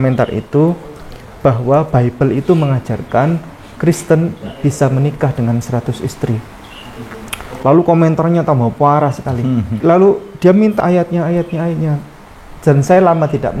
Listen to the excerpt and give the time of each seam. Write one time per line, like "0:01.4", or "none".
0:09.8
0:10.8